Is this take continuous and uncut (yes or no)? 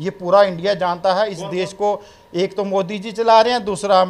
yes